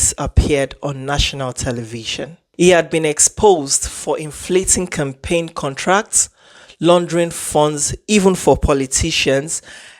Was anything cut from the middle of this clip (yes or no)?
yes